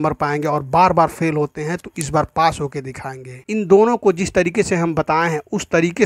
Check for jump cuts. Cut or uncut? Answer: cut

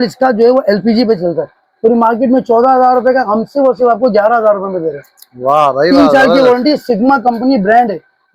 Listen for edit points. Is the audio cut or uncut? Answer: uncut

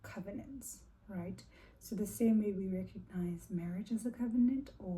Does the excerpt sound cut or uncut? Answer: uncut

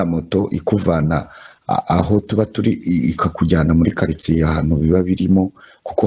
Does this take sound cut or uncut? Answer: uncut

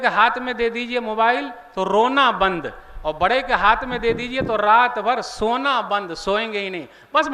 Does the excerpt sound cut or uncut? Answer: uncut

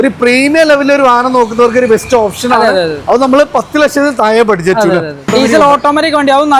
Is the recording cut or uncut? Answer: cut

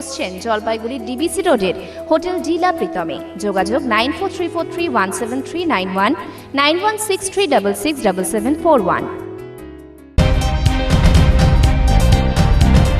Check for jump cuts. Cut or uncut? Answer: cut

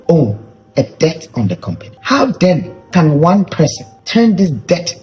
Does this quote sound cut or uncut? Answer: uncut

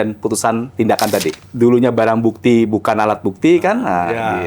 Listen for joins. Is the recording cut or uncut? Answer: cut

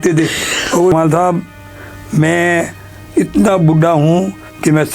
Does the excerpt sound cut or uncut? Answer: cut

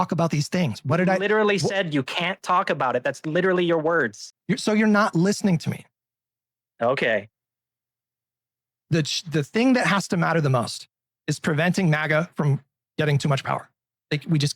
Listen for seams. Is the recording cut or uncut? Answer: cut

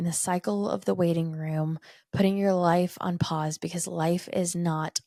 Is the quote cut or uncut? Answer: uncut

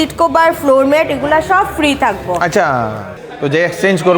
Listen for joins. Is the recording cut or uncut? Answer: cut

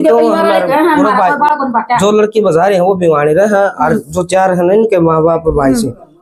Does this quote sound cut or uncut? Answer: uncut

